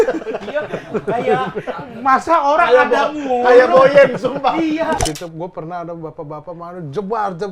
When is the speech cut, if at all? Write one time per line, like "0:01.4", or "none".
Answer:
0:05.0